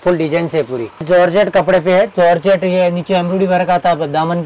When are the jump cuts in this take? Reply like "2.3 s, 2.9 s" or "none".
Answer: 1.1 s